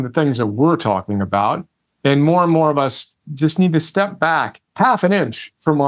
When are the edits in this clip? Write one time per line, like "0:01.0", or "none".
0:04.7